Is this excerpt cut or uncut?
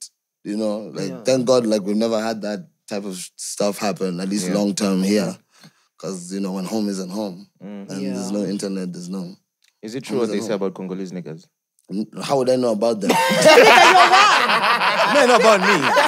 uncut